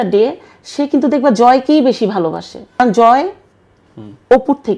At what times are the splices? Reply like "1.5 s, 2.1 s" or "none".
2.6 s